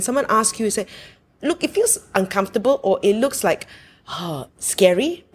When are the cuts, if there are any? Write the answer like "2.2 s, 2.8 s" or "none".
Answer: none